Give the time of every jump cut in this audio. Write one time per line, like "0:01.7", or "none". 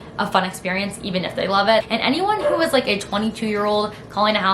0:01.9

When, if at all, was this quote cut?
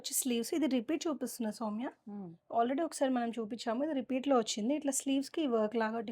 none

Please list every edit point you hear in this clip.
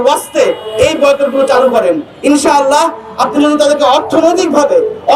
none

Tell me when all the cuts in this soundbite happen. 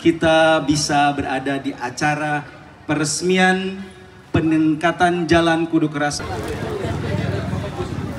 0:06.2

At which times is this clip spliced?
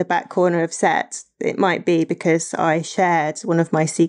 none

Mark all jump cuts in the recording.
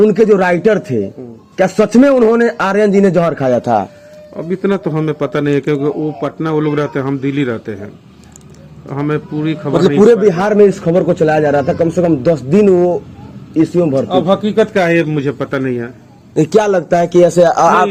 none

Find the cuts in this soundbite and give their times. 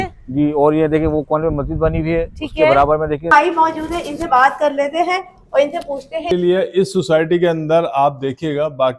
0:03.3
0:06.3

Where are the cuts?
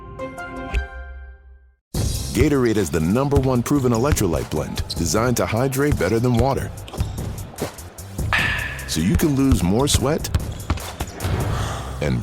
0:02.0

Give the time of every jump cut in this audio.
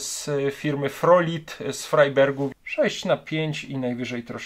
0:02.6

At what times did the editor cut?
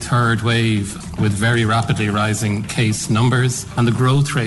0:01.1
0:03.7

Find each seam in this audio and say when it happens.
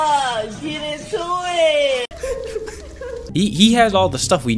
0:03.2

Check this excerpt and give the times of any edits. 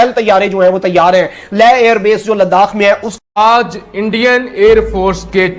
0:03.4

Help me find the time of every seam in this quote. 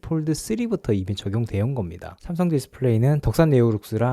0:02.1

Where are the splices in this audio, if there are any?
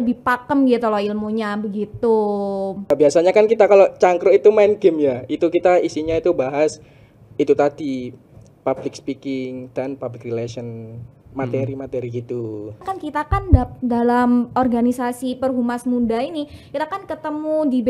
0:02.9
0:12.8

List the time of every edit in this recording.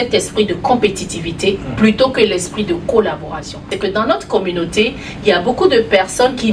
0:03.6

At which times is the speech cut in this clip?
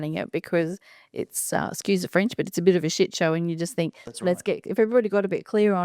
none

